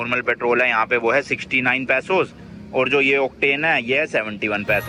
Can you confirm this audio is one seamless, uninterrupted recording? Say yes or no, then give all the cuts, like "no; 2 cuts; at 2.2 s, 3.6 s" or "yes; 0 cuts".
yes; 0 cuts